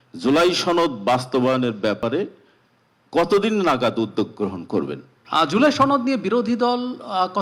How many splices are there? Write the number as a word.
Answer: one